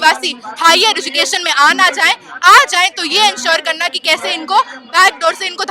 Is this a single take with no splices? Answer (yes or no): yes